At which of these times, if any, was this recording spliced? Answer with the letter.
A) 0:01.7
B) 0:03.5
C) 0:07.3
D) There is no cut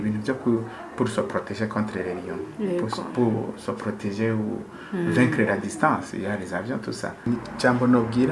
C